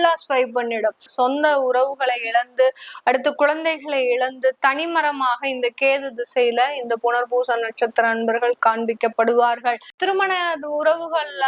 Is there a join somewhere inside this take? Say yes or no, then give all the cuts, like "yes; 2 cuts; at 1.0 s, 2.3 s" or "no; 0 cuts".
yes; 2 cuts; at 1.1 s, 10.0 s